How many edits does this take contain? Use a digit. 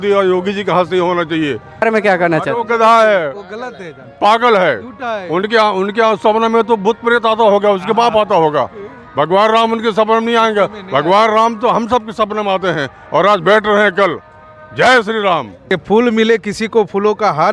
2